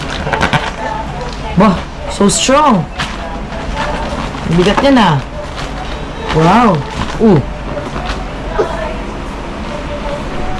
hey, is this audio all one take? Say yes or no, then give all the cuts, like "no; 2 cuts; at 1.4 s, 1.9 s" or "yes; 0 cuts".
yes; 0 cuts